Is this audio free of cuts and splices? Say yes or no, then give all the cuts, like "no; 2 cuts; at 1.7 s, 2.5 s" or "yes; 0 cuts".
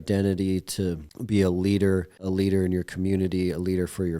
no; 2 cuts; at 1.1 s, 2.1 s